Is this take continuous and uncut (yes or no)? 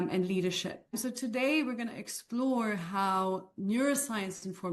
no